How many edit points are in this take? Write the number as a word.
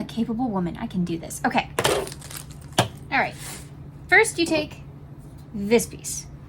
zero